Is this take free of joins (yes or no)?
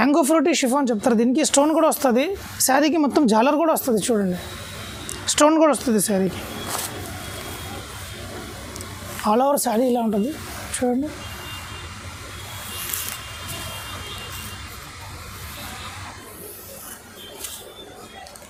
yes